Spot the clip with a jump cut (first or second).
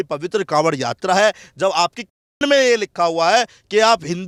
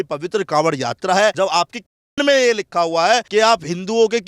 second